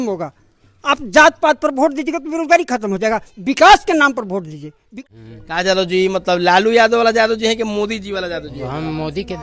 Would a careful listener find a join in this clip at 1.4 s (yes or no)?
no